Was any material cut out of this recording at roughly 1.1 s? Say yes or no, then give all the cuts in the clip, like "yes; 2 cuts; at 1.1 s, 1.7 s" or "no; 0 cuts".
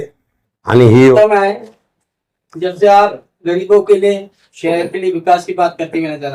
yes; 1 cut; at 1.1 s